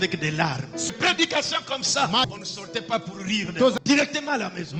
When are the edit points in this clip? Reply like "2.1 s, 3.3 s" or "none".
0.9 s, 2.3 s, 3.8 s